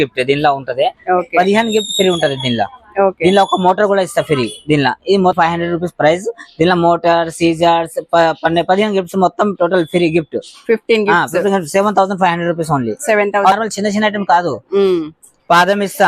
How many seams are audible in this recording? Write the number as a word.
two